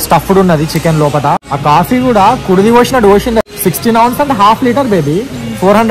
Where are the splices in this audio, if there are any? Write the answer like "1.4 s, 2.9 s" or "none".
1.4 s, 3.4 s